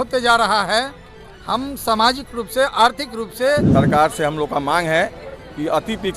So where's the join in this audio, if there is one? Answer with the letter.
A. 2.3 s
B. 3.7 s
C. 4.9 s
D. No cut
B